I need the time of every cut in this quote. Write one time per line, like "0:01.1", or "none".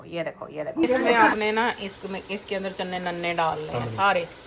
0:01.1

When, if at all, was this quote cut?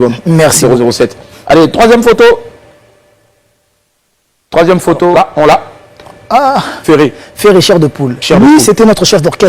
0:05.1

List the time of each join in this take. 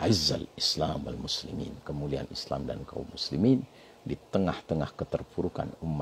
none

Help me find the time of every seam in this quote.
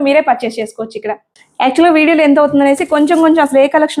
none

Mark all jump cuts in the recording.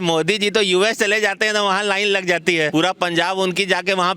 0:02.7

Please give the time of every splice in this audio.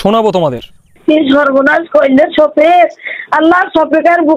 0:00.9

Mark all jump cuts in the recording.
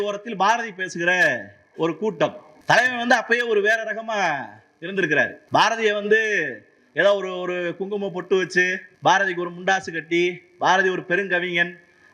0:02.5
0:05.4
0:08.8

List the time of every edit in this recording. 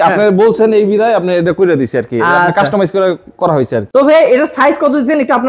none

